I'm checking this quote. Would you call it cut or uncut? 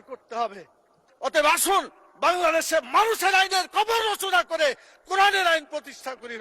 cut